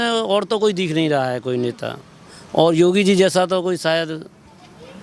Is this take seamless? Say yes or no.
yes